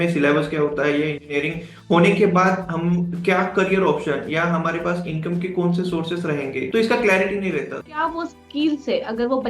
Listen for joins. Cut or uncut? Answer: cut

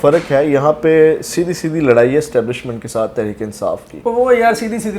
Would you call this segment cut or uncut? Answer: uncut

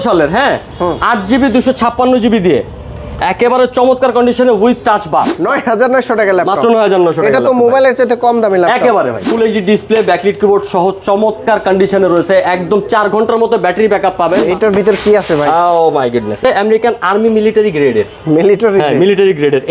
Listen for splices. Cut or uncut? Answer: cut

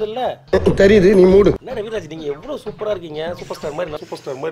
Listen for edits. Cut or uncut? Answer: cut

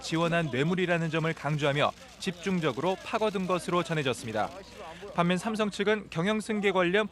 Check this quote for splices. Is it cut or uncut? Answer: cut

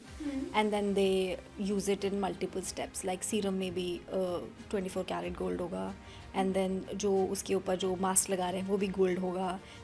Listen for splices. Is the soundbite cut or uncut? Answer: uncut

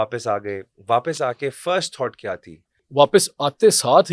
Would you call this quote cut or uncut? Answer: cut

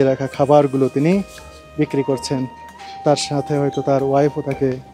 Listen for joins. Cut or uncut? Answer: uncut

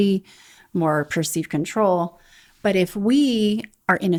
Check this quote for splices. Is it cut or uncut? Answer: uncut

